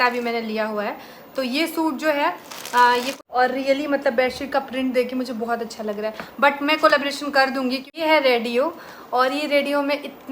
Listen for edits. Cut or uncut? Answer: cut